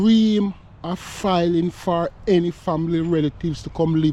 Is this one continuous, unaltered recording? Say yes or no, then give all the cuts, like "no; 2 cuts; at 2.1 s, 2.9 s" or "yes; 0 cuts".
yes; 0 cuts